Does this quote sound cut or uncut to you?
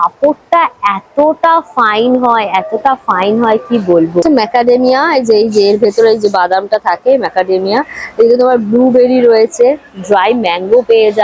cut